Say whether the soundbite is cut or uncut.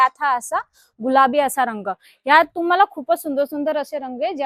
uncut